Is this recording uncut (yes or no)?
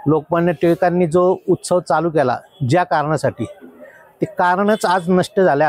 yes